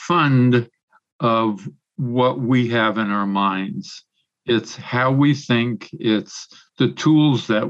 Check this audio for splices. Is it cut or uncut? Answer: uncut